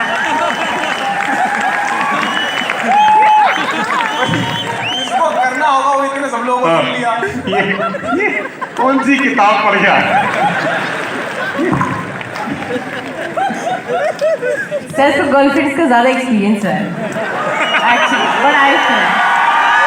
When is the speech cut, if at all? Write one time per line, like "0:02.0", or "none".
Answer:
none